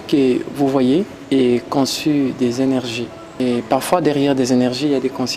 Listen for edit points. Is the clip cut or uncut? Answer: cut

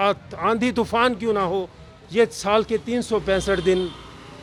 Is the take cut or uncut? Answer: uncut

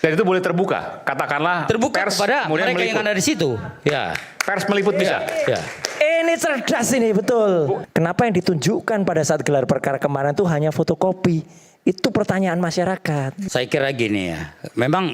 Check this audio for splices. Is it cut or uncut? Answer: cut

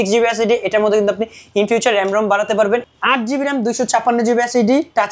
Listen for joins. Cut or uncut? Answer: cut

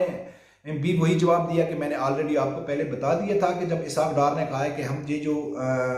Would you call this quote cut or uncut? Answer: uncut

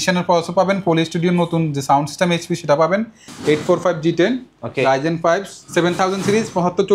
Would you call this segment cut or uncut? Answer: cut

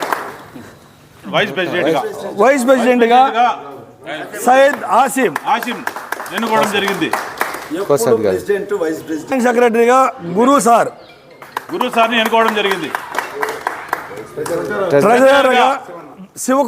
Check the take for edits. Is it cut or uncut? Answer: cut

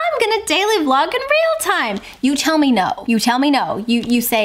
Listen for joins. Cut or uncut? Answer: uncut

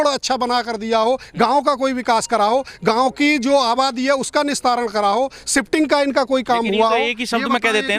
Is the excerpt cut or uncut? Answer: uncut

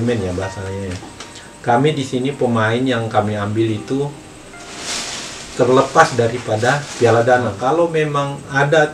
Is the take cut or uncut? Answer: cut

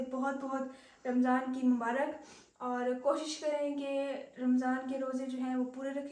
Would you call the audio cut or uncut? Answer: uncut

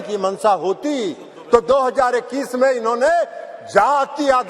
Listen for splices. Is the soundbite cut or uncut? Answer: uncut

